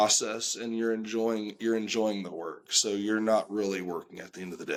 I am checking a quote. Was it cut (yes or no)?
no